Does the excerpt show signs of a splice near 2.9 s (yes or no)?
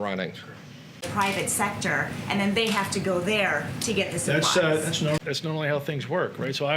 no